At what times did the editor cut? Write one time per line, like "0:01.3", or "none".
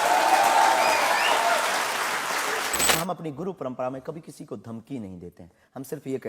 0:03.0